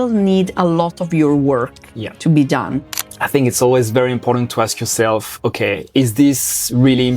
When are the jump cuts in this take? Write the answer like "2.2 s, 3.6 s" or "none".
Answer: 3.1 s